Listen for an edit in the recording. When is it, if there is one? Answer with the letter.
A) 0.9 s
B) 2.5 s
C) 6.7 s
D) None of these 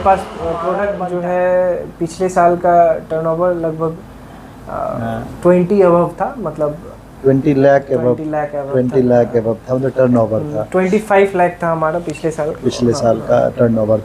A